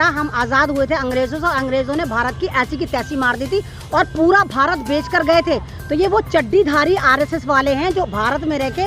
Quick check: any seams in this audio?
no; 0 cuts

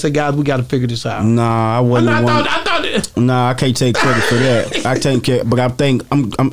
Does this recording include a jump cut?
no; 0 cuts

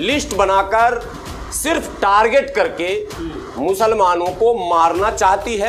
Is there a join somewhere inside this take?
no; 0 cuts

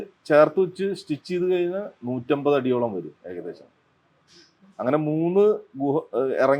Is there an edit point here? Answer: no; 0 cuts

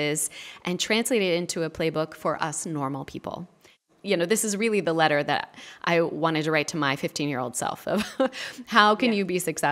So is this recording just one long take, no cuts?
no; 1 cut; at 3.8 s

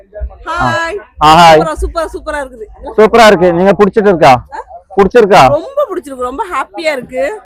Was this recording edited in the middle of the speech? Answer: no; 0 cuts

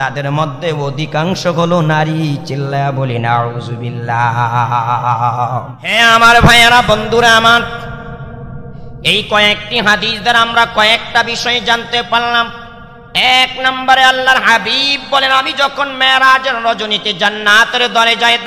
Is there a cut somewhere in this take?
yes; 1 cut; at 5.8 s

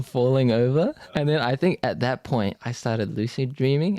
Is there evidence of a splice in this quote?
yes; 2 cuts; at 1.2 s, 2.7 s

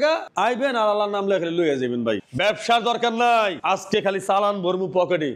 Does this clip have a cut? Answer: yes; 1 cut; at 2.2 s

